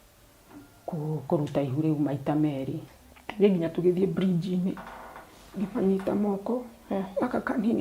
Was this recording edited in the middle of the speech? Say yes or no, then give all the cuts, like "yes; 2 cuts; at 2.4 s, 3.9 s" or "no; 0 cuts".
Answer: yes; 1 cut; at 2.8 s